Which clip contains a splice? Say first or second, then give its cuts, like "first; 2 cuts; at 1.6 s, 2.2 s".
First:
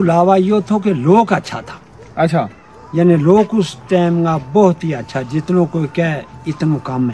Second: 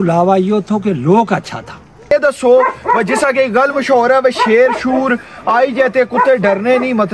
second; 1 cut; at 2.1 s